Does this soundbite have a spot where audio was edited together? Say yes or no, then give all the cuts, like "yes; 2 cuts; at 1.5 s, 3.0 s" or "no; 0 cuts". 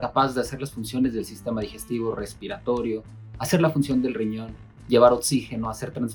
no; 0 cuts